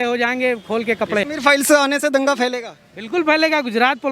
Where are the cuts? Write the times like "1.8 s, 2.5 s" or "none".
1.2 s